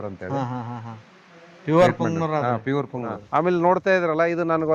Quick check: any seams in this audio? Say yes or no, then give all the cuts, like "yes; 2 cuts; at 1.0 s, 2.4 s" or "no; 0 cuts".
yes; 1 cut; at 3.3 s